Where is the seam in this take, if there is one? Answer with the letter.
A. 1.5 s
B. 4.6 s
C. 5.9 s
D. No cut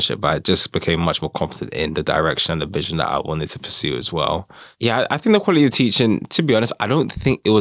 B